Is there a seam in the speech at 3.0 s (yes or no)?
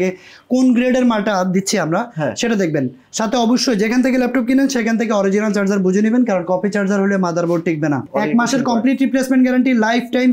no